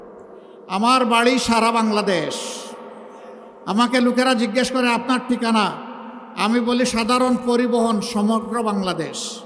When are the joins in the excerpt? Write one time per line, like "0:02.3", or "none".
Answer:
none